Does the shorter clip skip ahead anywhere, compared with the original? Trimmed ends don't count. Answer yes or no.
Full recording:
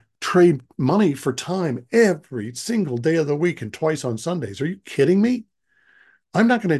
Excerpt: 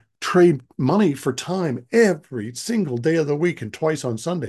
no